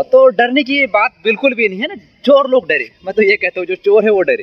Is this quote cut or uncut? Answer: uncut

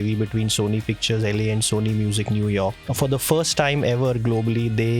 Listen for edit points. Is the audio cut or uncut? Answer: cut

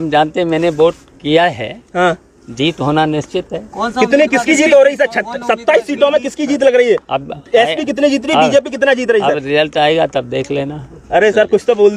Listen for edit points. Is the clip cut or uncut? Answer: uncut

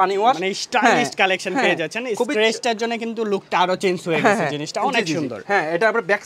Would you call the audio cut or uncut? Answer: uncut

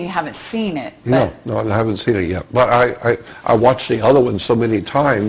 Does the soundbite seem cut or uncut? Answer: cut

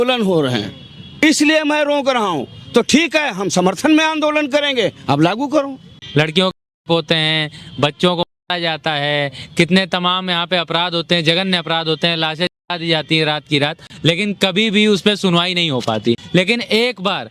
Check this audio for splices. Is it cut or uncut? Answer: cut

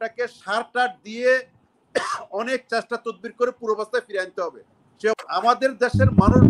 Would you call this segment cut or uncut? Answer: cut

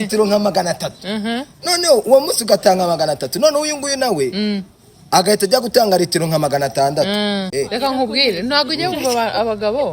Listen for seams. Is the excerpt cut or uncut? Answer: cut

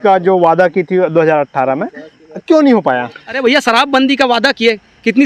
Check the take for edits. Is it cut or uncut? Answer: cut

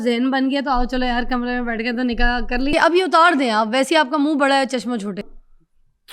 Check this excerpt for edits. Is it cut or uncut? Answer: cut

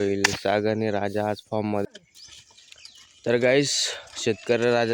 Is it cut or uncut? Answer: cut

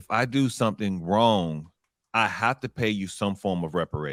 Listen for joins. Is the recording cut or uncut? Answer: uncut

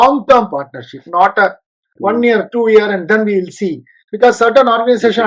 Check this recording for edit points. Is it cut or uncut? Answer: uncut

